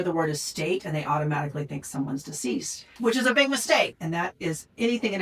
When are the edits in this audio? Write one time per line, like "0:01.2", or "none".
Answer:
0:02.9
0:04.0